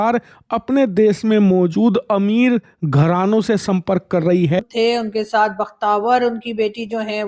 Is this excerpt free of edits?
no; 1 cut; at 4.6 s

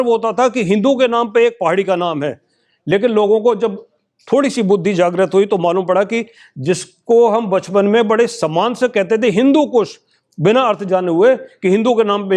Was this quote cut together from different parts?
no; 0 cuts

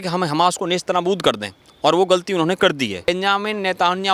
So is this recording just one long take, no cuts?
no; 1 cut; at 3.1 s

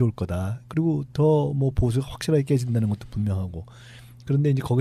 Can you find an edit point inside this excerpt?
yes; 1 cut; at 1.1 s

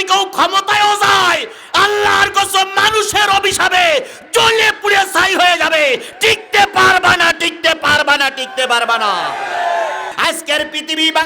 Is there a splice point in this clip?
yes; 1 cut; at 10.1 s

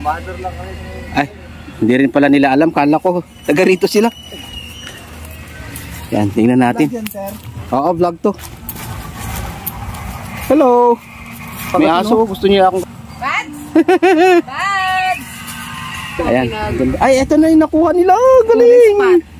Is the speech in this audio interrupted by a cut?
yes; 2 cuts; at 12.8 s, 16.5 s

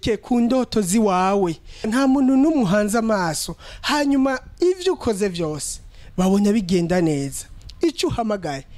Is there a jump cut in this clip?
yes; 1 cut; at 1.9 s

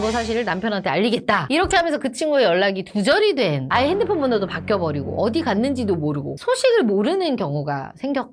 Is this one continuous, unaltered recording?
yes; 0 cuts

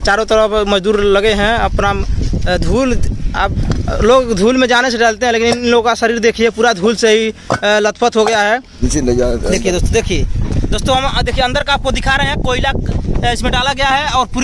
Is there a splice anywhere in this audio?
yes; 1 cut; at 8.8 s

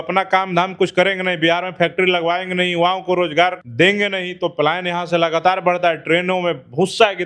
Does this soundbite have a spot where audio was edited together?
yes; 1 cut; at 3.6 s

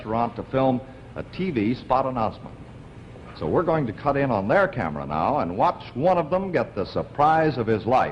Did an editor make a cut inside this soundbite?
no; 0 cuts

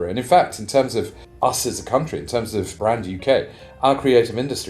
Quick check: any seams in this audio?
yes; 2 cuts; at 1.2 s, 2.7 s

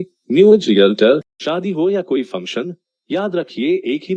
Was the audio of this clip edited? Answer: yes; 1 cut; at 1.4 s

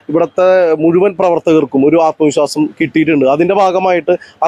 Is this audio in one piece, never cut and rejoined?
yes; 0 cuts

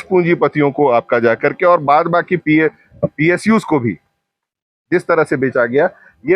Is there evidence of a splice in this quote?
no; 0 cuts

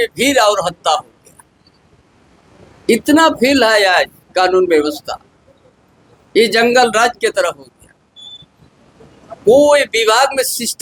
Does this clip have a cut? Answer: no; 0 cuts

